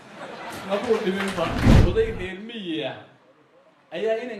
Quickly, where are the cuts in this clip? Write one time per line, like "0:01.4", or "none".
0:01.7